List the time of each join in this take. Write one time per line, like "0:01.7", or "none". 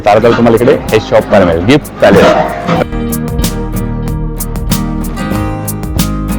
0:02.8